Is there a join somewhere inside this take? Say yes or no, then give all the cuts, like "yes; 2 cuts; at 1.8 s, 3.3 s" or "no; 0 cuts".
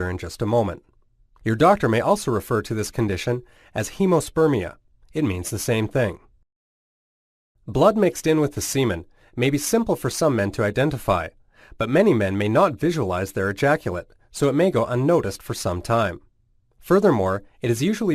yes; 1 cut; at 15.9 s